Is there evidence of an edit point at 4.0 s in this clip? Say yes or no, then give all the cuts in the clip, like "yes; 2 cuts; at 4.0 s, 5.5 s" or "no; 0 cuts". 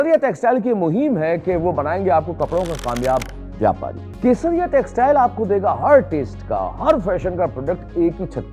yes; 1 cut; at 4.0 s